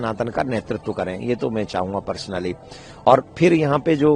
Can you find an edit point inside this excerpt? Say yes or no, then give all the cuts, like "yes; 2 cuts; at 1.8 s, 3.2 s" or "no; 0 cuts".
no; 0 cuts